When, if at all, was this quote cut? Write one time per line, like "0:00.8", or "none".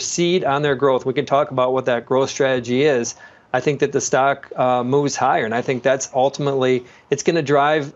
none